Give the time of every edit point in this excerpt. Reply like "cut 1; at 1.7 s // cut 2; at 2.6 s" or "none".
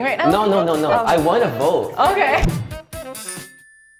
none